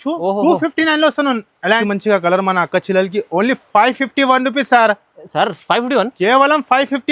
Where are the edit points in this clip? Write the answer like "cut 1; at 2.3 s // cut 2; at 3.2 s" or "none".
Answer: cut 1; at 1.6 s